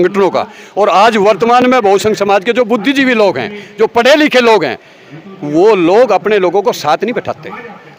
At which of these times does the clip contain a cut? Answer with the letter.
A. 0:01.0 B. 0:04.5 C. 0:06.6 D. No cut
D